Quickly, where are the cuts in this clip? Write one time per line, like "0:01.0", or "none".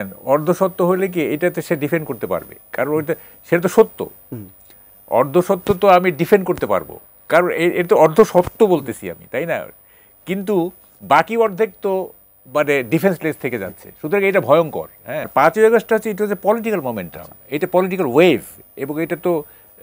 0:15.3